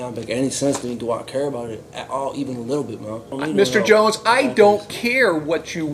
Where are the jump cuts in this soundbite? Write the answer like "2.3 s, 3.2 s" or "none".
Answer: 3.3 s